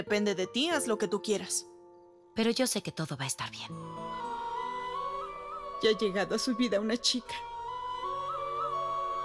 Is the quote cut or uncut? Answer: cut